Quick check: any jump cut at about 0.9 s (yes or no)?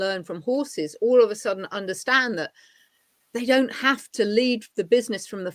no